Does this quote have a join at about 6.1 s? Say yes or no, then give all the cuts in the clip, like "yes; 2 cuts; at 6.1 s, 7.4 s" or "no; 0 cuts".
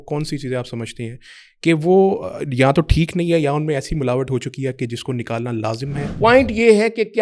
yes; 1 cut; at 6.1 s